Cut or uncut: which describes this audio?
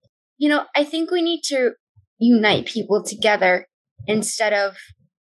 uncut